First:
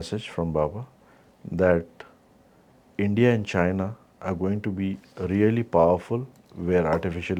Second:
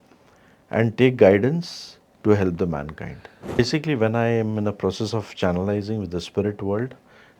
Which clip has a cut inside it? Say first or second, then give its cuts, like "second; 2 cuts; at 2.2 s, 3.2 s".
second; 1 cut; at 3.6 s